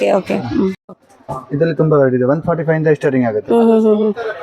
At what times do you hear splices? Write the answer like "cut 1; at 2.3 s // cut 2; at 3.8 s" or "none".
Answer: cut 1; at 0.9 s